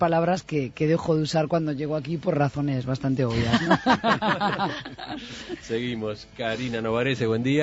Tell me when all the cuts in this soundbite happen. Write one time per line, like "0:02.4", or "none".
none